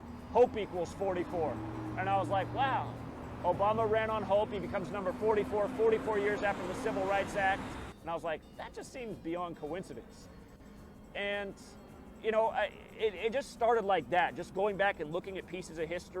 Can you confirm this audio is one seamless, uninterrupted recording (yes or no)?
no